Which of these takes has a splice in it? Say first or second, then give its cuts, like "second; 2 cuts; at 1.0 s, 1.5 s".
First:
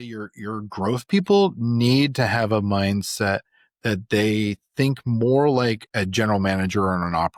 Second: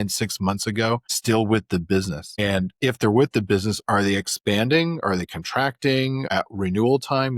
second; 3 cuts; at 1.1 s, 2.4 s, 6.3 s